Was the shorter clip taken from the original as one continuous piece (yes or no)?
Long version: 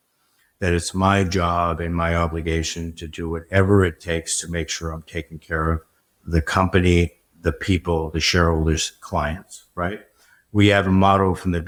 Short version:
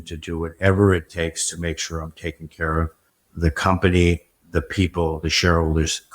yes